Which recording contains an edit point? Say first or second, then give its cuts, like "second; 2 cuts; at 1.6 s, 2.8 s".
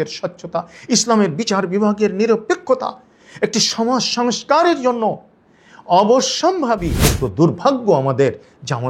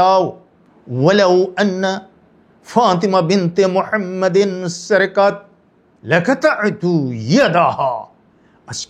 first; 1 cut; at 7.0 s